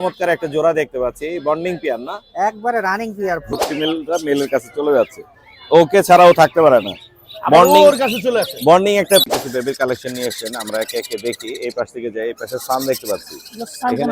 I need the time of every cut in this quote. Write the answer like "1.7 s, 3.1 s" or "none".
3.5 s, 9.2 s